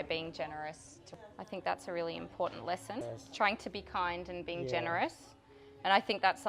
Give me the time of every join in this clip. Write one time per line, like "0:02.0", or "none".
0:01.1
0:03.2